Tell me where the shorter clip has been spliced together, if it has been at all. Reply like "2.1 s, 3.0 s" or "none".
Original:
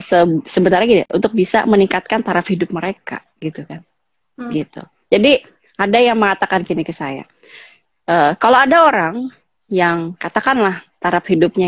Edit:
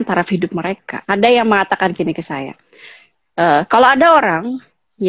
0.9 s